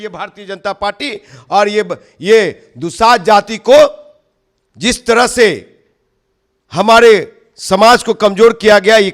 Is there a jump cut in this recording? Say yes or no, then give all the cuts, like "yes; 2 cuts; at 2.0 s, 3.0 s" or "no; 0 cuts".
no; 0 cuts